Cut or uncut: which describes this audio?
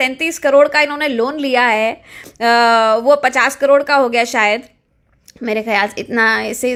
uncut